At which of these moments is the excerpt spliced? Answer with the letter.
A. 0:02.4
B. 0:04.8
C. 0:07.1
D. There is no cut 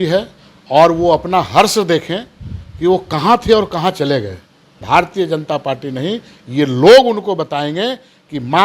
B